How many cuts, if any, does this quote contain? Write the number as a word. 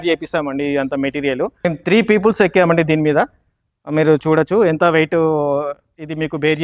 one